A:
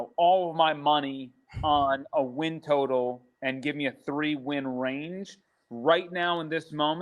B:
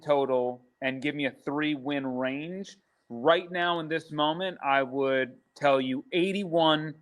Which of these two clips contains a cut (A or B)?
B